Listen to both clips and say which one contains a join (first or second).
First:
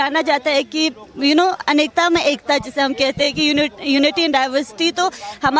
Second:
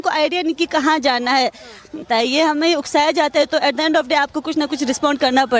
second